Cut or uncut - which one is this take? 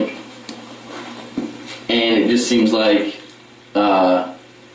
cut